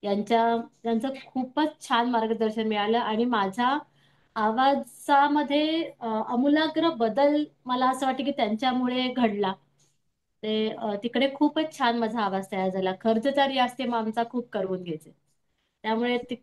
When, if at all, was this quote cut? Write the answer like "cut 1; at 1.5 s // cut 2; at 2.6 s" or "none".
none